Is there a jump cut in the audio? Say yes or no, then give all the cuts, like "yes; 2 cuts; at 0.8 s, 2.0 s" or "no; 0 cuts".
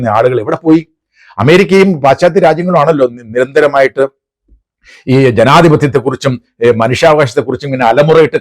no; 0 cuts